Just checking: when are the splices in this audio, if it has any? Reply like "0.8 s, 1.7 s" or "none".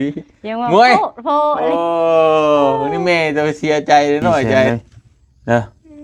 4.7 s